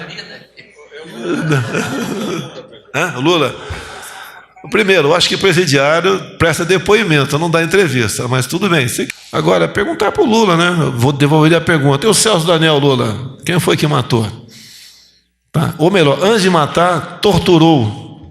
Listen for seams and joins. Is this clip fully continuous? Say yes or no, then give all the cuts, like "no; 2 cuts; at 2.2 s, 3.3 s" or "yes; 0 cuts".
no; 1 cut; at 9.1 s